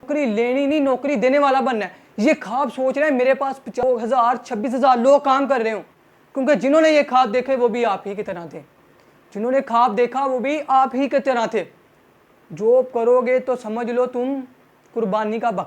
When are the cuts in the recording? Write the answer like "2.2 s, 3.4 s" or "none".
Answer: none